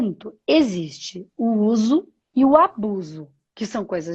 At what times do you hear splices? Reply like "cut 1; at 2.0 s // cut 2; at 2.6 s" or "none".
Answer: cut 1; at 2.2 s